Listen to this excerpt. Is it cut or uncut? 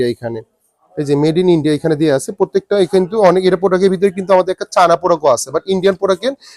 uncut